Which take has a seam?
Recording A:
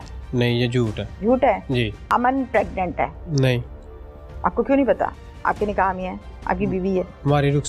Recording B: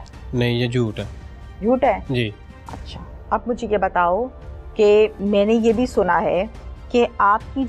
A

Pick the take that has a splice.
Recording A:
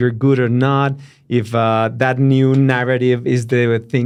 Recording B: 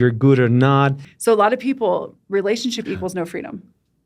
B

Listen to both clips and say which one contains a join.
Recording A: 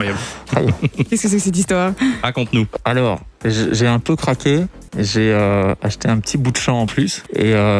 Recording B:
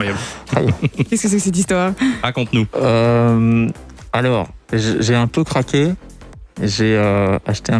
A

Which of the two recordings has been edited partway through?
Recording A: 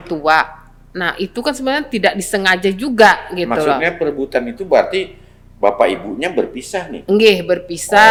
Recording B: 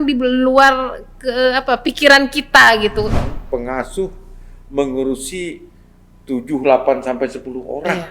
B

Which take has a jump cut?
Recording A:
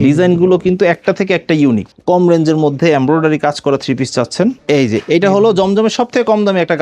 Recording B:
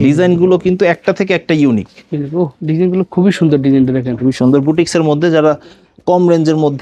A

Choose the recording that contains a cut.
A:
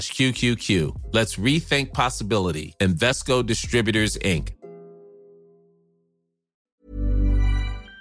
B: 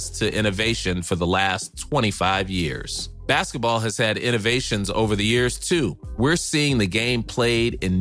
A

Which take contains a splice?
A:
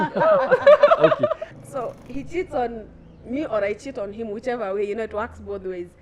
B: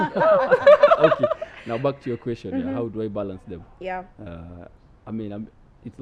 A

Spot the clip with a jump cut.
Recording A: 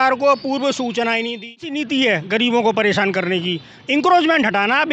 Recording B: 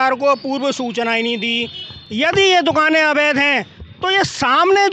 A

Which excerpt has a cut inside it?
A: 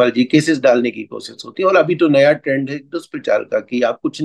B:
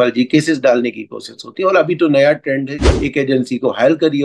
B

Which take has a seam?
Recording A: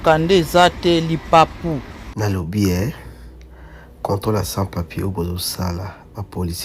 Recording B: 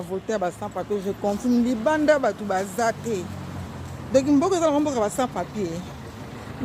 A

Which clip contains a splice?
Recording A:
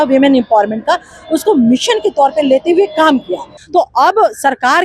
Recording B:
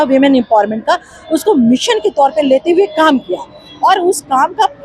A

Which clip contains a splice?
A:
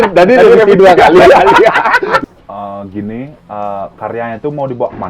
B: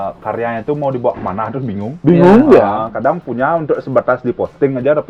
A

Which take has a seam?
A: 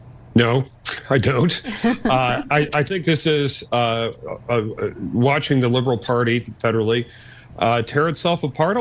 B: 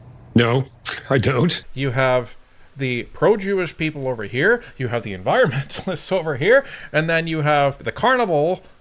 B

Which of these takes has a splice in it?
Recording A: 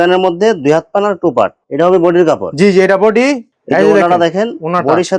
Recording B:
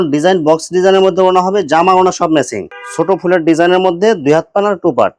B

